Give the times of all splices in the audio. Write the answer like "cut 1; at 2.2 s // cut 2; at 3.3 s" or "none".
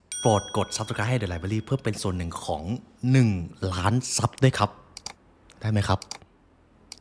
none